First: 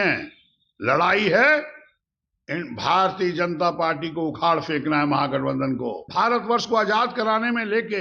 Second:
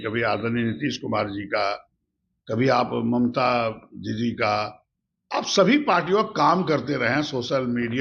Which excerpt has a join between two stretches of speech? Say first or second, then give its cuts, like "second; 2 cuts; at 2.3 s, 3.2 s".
first; 1 cut; at 6.0 s